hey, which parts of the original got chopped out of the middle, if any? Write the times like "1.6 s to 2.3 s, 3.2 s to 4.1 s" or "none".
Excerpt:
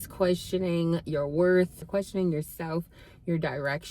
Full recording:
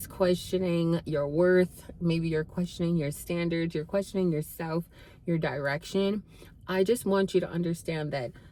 1.9 s to 3.9 s